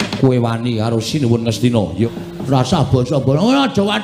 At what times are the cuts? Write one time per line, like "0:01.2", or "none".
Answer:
0:02.1

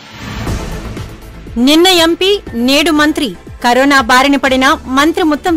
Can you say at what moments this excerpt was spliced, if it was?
0:00.9

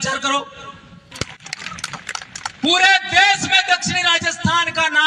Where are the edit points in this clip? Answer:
0:01.1

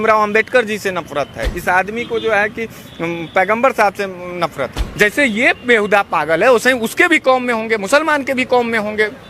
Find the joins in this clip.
0:04.8

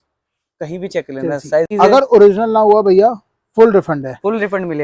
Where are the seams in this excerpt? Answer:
0:01.7

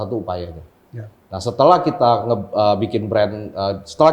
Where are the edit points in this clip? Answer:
none

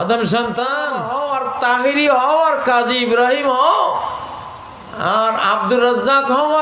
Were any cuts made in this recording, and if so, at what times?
0:01.0

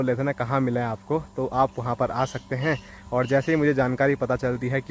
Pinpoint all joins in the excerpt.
none

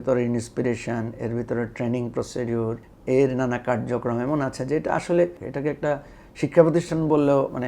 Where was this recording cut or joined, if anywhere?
0:02.9
0:05.4

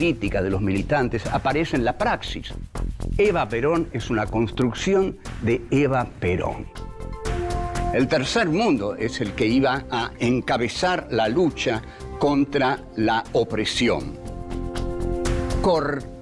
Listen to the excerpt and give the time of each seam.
0:04.0

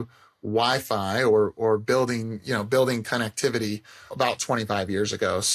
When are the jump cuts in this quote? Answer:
0:04.1

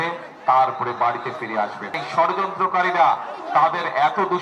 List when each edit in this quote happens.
0:01.9

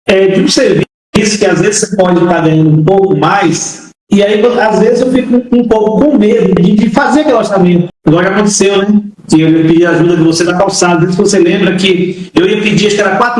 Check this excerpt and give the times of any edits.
0:06.6

